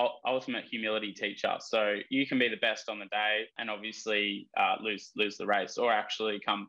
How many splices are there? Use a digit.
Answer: 1